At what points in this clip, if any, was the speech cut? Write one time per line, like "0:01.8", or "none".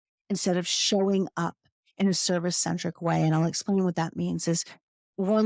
none